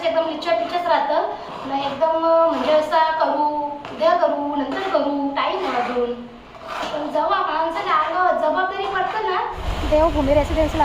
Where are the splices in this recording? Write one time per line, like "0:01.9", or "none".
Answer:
0:09.6